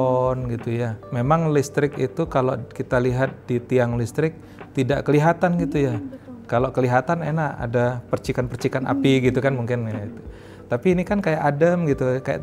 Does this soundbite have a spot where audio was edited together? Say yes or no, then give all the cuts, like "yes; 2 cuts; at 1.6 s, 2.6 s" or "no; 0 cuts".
yes; 1 cut; at 1.0 s